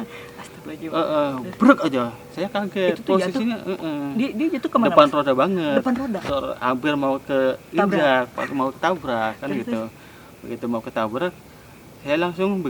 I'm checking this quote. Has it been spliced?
no; 0 cuts

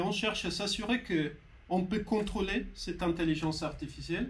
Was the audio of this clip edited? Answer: no; 0 cuts

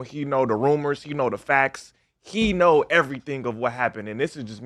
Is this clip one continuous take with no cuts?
yes; 0 cuts

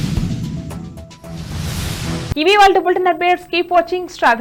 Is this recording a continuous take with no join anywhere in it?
yes; 0 cuts

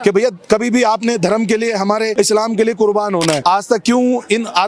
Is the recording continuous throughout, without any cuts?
no; 2 cuts; at 2.1 s, 3.4 s

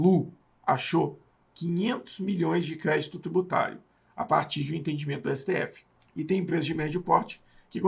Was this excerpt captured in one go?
yes; 0 cuts

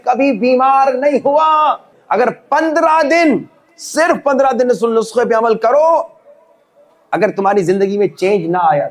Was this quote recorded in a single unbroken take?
no; 1 cut; at 2.0 s

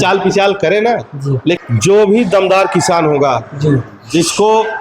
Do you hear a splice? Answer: yes; 1 cut; at 1.6 s

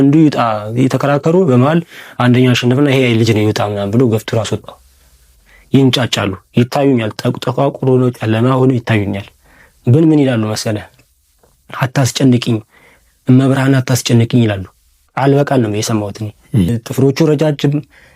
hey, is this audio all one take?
no; 2 cuts; at 5.5 s, 16.7 s

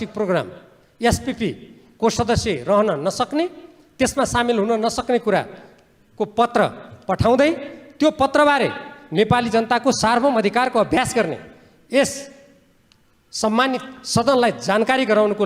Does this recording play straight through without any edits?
yes; 0 cuts

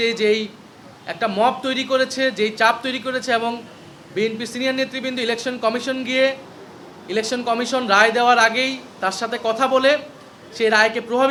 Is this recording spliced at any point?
no; 0 cuts

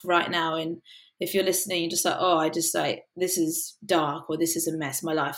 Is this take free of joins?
yes; 0 cuts

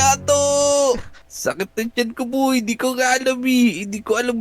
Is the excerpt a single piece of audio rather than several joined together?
no; 1 cut; at 1.1 s

